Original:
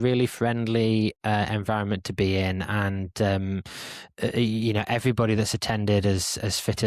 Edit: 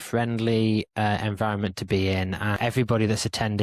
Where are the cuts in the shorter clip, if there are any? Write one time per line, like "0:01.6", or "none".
0:02.6